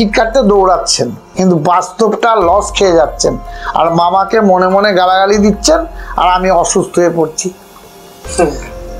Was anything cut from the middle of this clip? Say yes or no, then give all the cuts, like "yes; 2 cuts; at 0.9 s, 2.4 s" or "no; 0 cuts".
yes; 1 cut; at 1.2 s